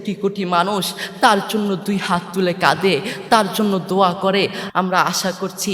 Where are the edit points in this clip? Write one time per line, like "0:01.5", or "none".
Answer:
0:04.6